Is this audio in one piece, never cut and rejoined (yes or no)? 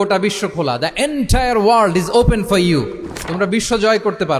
yes